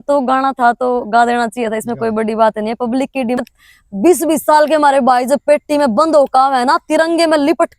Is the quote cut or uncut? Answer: cut